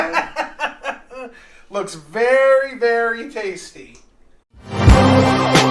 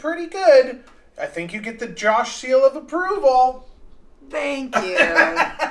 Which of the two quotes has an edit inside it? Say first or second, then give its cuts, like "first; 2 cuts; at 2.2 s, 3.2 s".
first; 1 cut; at 4.1 s